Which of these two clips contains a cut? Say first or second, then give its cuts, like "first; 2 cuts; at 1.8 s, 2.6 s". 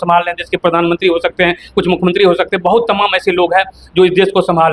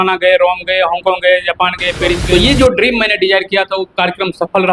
second; 1 cut; at 2.2 s